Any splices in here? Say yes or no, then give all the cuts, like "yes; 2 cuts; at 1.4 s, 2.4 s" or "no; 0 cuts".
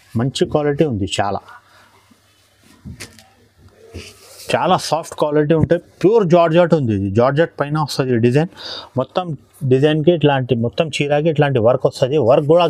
no; 0 cuts